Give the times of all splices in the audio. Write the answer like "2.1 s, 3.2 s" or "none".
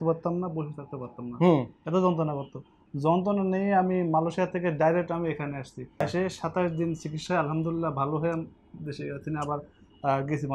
5.9 s